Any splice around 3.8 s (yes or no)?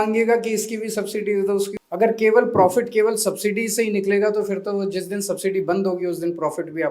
no